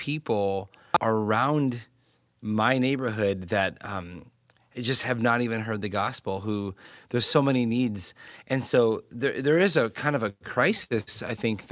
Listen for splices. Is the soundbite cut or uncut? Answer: cut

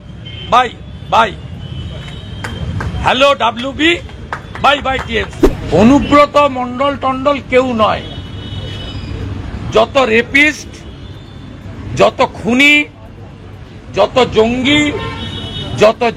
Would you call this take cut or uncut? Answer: cut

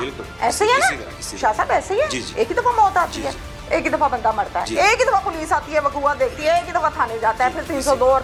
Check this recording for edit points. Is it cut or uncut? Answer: uncut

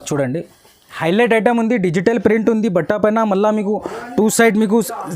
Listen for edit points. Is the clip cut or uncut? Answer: cut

